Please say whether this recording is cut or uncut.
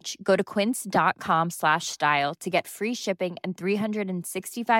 uncut